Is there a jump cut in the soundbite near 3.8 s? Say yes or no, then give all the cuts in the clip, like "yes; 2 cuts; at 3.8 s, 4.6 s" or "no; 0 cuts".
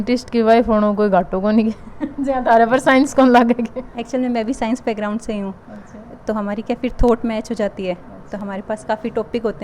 no; 0 cuts